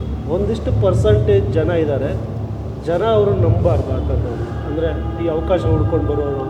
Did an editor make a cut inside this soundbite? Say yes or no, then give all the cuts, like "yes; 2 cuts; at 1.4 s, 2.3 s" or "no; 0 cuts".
no; 0 cuts